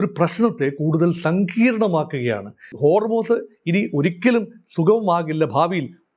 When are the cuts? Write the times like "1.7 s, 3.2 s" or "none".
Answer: 2.7 s